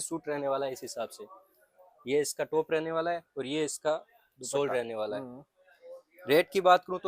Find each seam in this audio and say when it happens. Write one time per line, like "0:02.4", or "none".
none